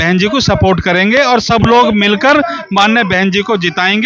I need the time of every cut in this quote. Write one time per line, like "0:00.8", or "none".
none

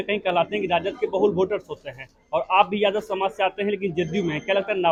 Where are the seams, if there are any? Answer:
none

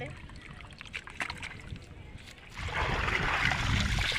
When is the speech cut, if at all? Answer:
0:02.6

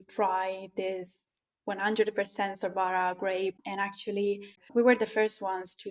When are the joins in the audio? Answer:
0:03.7
0:04.6

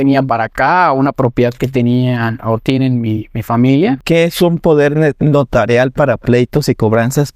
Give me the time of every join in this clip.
0:04.0

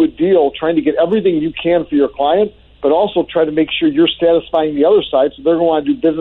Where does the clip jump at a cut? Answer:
none

